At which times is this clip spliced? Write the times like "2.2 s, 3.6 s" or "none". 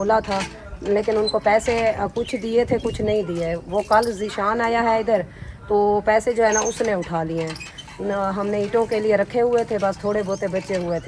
none